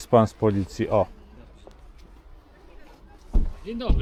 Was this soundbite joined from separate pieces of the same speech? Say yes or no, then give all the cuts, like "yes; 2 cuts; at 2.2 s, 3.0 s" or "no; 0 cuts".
no; 0 cuts